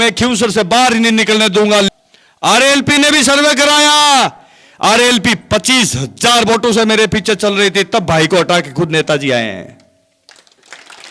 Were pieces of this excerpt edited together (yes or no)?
yes